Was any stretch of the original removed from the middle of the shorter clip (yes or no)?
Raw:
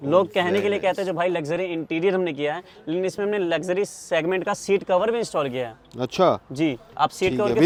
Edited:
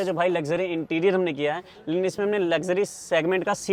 no